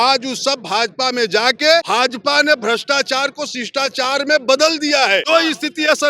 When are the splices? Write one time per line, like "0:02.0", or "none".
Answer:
0:01.9
0:05.2

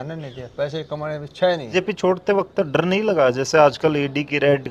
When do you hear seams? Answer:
0:01.7

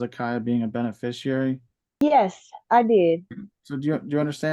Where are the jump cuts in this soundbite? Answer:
0:01.7

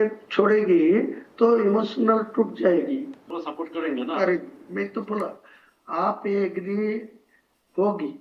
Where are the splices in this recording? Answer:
0:03.2

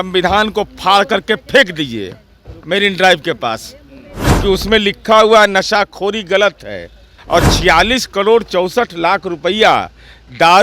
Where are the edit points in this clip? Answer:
0:07.1

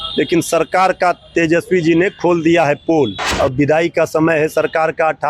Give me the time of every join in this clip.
0:03.2

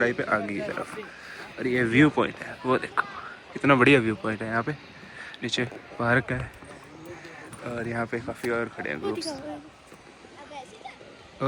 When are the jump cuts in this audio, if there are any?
none

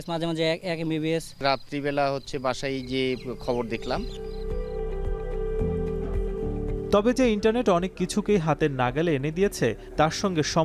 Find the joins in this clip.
none

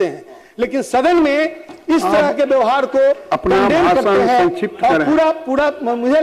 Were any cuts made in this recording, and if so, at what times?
none

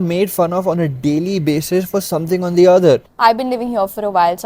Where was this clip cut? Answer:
0:03.1

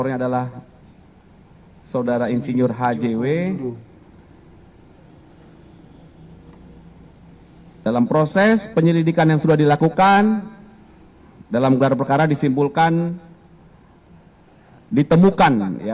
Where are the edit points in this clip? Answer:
none

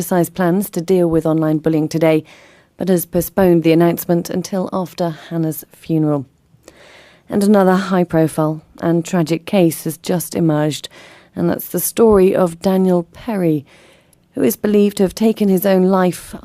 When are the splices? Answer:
0:03.4

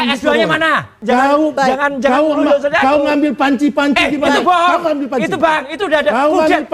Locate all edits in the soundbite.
0:01.0

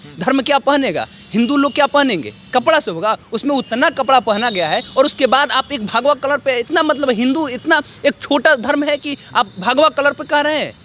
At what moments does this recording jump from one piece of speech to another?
none

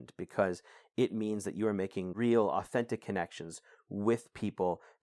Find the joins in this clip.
0:02.1

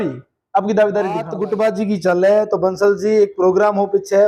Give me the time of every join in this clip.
0:01.4

